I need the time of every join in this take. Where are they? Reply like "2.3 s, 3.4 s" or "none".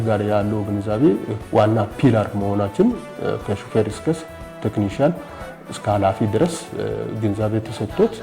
1.4 s